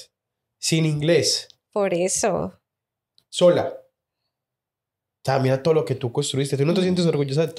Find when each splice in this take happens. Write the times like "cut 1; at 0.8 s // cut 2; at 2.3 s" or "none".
none